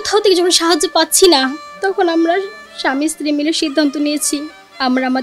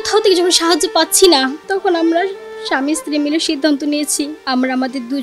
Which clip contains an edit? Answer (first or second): second